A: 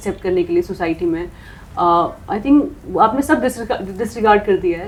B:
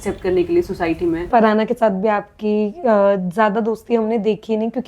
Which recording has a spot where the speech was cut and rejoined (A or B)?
B